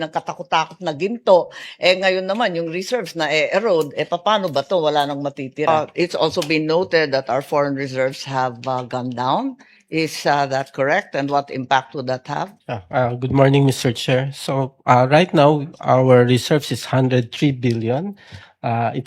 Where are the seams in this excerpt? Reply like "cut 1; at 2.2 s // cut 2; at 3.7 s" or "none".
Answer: cut 1; at 5.7 s // cut 2; at 12.6 s